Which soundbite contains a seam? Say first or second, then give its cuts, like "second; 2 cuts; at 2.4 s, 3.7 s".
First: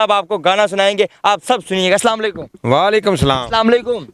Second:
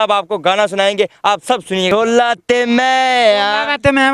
second; 1 cut; at 1.9 s